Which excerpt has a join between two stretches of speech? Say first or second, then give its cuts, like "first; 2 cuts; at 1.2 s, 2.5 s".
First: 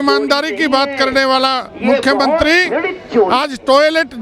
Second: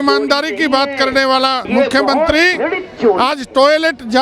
second; 1 cut; at 1.6 s